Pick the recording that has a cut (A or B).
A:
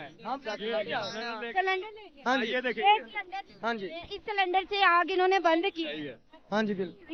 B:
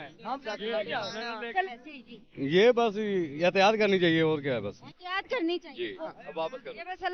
B